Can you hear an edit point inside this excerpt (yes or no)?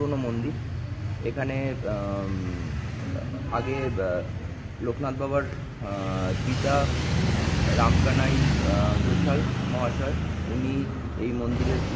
no